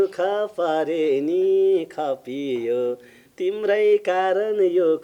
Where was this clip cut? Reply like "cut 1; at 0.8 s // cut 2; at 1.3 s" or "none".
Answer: none